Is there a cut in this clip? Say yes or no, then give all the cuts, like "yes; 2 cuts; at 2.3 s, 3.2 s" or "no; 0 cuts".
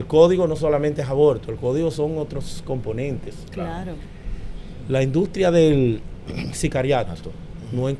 no; 0 cuts